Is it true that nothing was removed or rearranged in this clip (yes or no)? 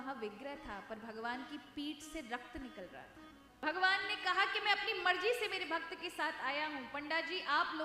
no